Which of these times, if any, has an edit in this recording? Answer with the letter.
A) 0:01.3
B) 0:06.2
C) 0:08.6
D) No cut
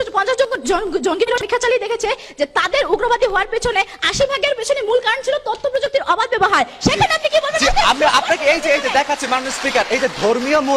A